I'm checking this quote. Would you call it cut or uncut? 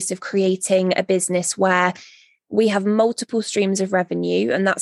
uncut